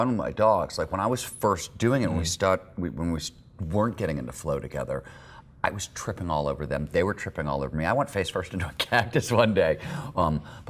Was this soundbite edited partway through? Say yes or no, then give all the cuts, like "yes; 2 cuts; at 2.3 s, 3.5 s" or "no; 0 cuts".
no; 0 cuts